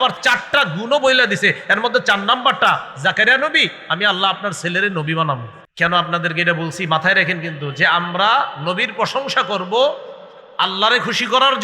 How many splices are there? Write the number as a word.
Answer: one